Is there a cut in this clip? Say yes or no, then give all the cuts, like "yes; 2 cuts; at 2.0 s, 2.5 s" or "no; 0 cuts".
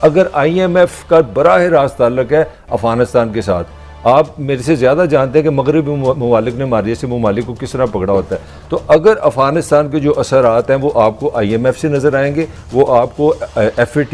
no; 0 cuts